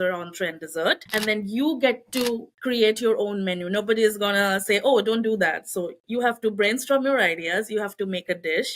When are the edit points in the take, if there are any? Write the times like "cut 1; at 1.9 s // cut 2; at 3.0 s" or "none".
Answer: cut 1; at 1.0 s // cut 2; at 2.5 s